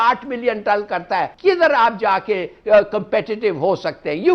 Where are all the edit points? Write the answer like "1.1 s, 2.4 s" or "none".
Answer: 1.3 s